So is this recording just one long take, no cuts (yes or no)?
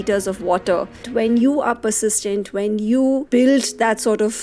no